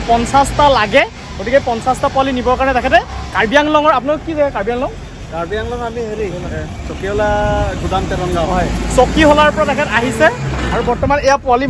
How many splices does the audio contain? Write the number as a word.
zero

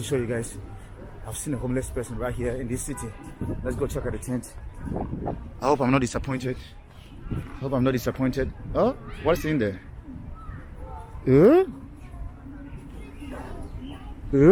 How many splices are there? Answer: zero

